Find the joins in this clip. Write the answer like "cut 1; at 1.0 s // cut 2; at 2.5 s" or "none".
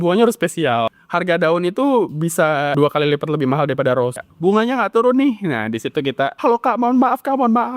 cut 1; at 1.0 s // cut 2; at 2.7 s // cut 3; at 4.2 s // cut 4; at 6.3 s